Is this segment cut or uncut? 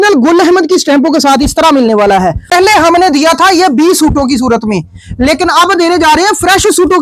cut